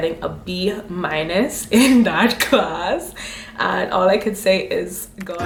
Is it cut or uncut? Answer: uncut